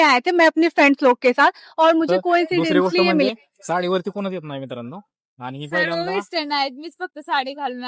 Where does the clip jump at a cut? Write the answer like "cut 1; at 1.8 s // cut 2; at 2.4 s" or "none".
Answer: cut 1; at 3.3 s

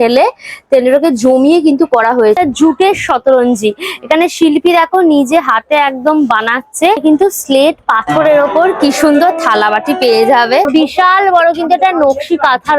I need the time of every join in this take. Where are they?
cut 1; at 2.4 s // cut 2; at 7.0 s // cut 3; at 10.7 s

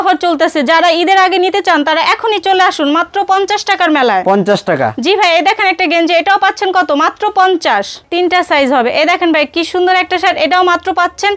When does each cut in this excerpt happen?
cut 1; at 8.0 s

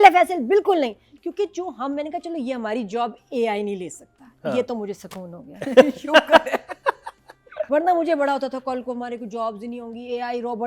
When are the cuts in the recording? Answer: none

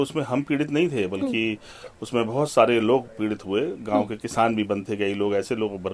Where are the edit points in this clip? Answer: none

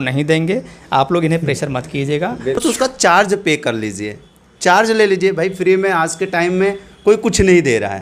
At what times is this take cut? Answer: cut 1; at 2.6 s

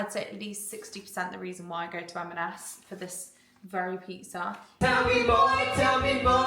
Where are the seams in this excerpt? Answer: cut 1; at 4.7 s

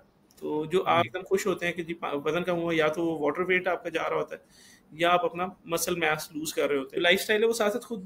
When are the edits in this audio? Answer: cut 1; at 6.9 s

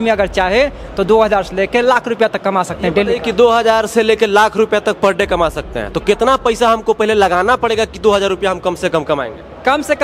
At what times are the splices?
none

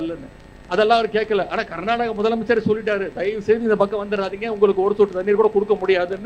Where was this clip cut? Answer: none

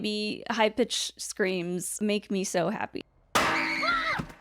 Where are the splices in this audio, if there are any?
cut 1; at 1.9 s // cut 2; at 3.0 s

